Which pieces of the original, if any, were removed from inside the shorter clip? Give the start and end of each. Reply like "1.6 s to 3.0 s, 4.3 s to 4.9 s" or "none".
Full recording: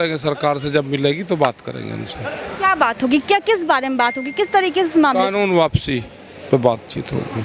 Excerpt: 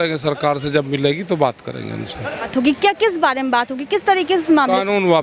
2.5 s to 2.9 s